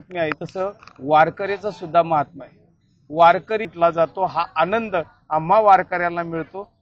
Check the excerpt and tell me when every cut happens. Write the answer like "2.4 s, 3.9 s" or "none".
3.7 s